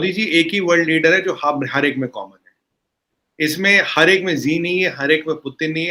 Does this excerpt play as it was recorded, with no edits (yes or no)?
yes